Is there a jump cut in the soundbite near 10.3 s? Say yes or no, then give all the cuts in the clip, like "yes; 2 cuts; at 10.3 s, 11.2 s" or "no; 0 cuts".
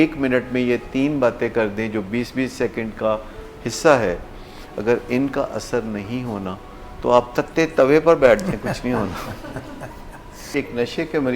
yes; 1 cut; at 10.3 s